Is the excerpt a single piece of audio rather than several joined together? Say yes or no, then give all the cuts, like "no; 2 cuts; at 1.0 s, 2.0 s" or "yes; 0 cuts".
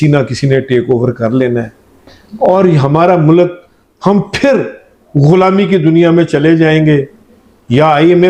yes; 0 cuts